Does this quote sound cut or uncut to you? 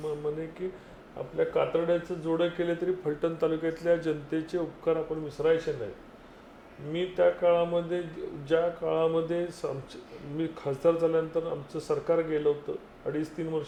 uncut